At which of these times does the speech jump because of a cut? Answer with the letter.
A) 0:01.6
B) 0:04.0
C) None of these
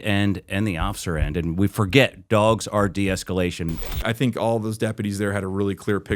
B